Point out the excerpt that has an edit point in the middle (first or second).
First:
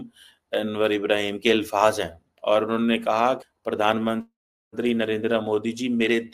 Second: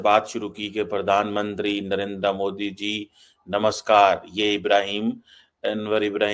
first